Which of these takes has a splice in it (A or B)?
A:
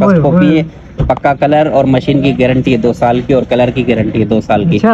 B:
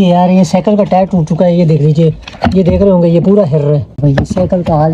B